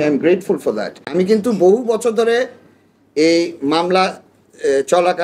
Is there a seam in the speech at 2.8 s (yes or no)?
no